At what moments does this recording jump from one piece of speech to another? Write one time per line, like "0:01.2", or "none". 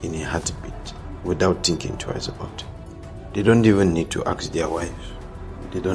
0:02.8